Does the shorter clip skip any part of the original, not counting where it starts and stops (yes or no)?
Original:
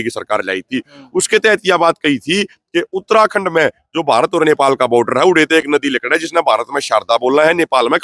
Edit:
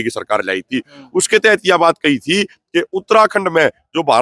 no